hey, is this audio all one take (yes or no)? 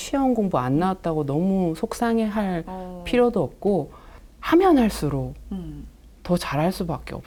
yes